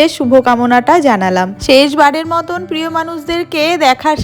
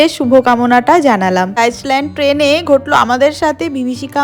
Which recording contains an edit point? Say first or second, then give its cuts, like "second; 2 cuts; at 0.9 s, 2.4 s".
second; 1 cut; at 1.6 s